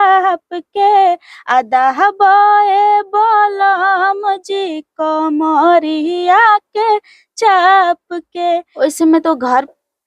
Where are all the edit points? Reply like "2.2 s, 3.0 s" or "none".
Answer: 8.7 s

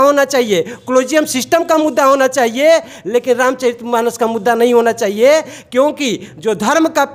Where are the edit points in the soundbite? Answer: none

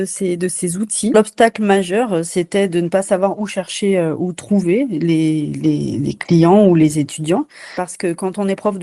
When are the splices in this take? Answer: 1.1 s, 7.9 s

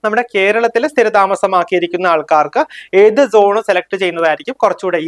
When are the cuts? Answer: none

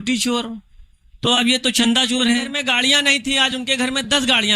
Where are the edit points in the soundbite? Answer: 2.6 s

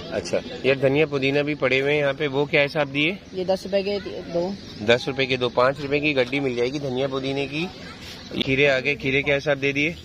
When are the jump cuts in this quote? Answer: 8.4 s

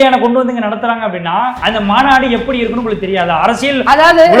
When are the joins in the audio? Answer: 1.6 s

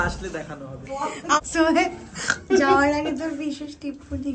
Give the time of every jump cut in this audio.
1.4 s

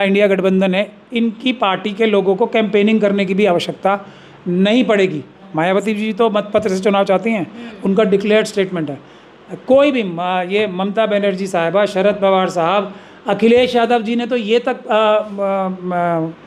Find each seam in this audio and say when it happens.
5.5 s

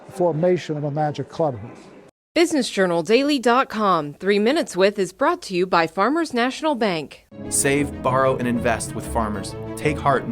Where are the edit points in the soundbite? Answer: 2.0 s

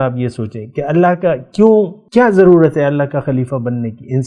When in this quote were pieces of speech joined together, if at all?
2.0 s

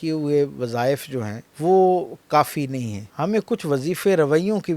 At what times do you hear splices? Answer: 1.4 s, 3.0 s

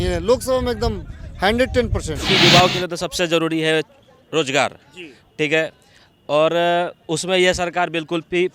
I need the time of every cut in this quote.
2.2 s

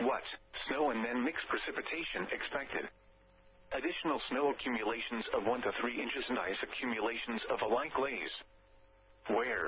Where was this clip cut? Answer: none

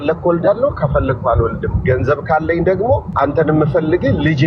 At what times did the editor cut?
3.1 s

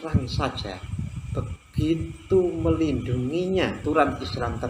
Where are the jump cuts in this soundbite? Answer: 3.8 s

